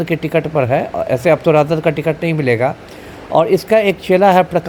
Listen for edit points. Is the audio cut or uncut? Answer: uncut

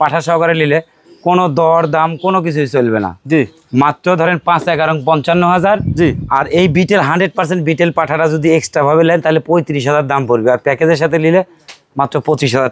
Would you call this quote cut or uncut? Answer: uncut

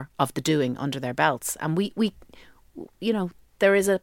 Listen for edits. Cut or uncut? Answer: uncut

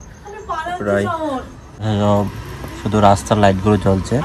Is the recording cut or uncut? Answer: cut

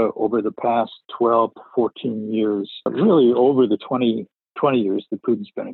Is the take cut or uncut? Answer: cut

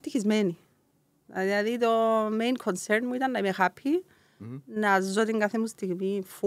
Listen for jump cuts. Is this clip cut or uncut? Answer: uncut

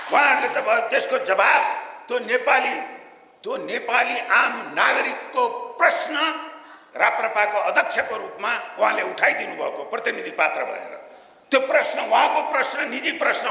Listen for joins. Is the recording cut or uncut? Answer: uncut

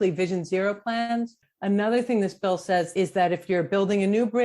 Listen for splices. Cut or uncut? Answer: cut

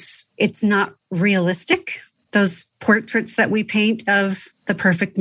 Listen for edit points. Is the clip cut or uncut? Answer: uncut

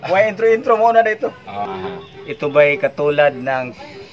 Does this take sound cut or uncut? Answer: cut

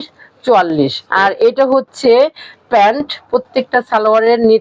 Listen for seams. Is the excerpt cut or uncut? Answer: cut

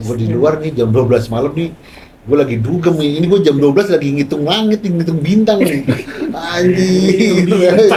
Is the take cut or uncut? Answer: uncut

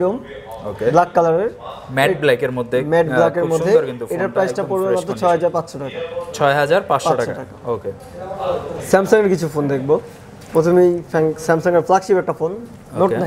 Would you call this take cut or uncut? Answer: uncut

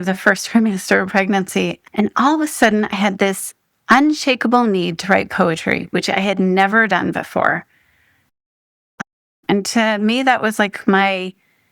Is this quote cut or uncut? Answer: cut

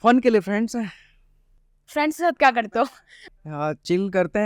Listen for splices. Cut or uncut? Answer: uncut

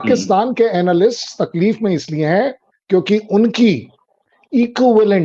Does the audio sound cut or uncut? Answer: uncut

